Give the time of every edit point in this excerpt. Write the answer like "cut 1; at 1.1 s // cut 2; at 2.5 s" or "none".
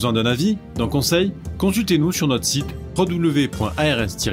none

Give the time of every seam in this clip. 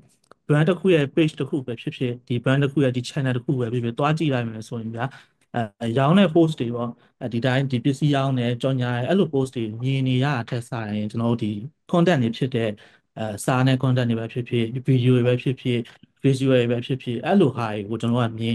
none

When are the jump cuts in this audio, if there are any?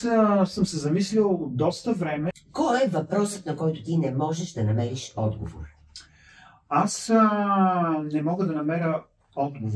cut 1; at 2.3 s

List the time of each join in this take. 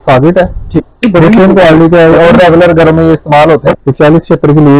cut 1; at 0.9 s // cut 2; at 3.7 s

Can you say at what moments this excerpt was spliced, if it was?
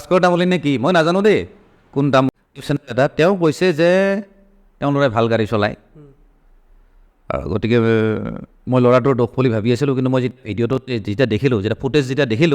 cut 1; at 2.3 s

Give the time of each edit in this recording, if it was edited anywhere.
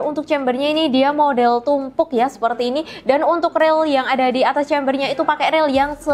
none

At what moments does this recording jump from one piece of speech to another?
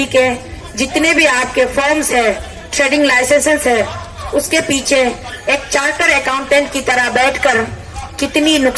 none

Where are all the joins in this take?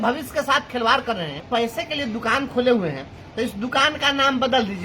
cut 1; at 1.4 s

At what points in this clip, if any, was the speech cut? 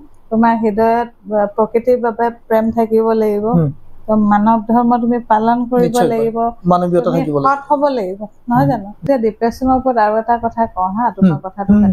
cut 1; at 9.0 s

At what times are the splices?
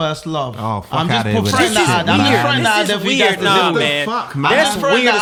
none

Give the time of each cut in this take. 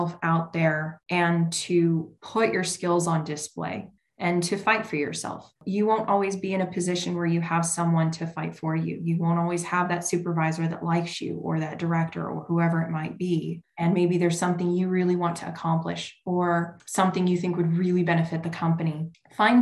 cut 1; at 16.8 s

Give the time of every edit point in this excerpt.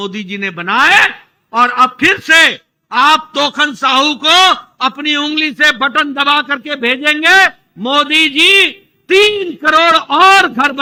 none

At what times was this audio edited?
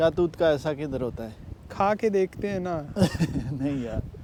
none

